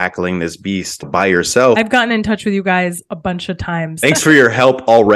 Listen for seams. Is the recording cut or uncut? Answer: cut